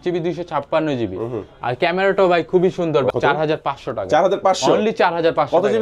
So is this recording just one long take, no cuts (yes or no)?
no